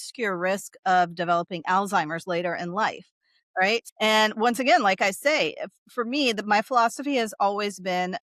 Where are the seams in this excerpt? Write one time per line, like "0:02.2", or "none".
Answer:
0:03.9